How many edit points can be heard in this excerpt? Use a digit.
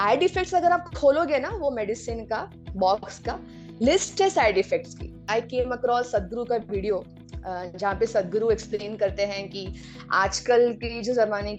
1